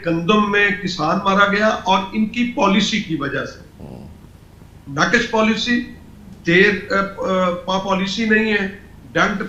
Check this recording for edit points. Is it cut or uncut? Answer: uncut